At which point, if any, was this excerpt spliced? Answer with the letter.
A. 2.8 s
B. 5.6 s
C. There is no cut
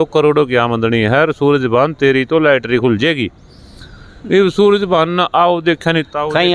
C